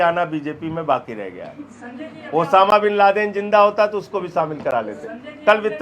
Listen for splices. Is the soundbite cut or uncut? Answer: uncut